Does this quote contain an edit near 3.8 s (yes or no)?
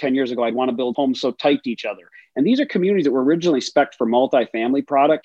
no